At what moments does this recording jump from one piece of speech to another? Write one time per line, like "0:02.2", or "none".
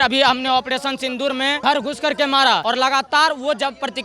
0:01.6
0:02.6